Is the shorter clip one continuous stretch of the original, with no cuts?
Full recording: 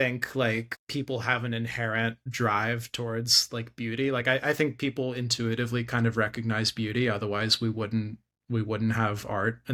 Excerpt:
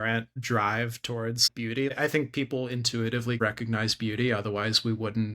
no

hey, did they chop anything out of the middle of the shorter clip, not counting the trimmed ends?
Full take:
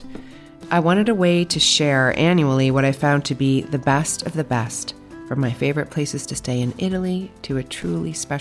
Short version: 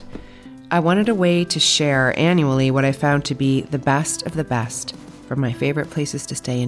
no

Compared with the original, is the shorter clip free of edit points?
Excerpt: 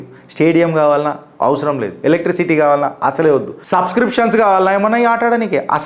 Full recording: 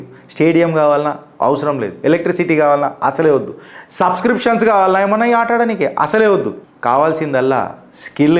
no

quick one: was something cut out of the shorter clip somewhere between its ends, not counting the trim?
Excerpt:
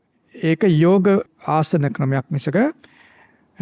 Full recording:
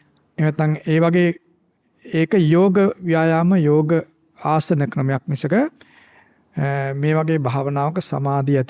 yes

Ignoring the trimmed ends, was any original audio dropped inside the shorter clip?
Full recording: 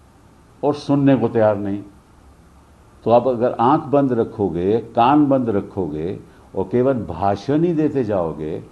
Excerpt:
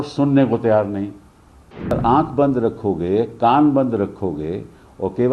yes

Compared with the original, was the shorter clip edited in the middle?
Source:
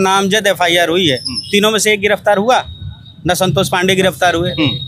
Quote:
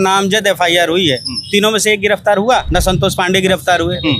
yes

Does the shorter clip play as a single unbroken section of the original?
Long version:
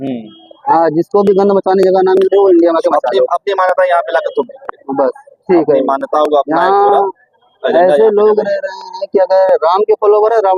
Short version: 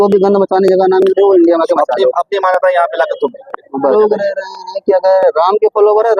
no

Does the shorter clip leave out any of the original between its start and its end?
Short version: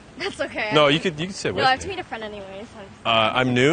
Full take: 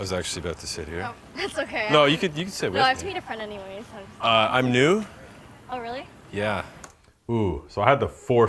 no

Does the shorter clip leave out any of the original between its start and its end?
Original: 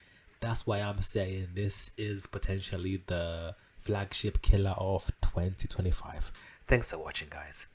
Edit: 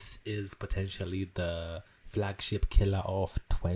no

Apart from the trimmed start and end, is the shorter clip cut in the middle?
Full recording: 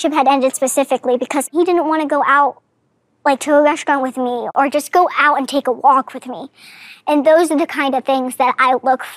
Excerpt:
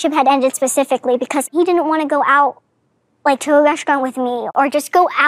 no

